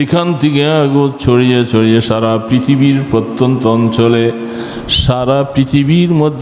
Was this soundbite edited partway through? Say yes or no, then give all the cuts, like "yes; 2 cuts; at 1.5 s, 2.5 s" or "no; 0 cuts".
no; 0 cuts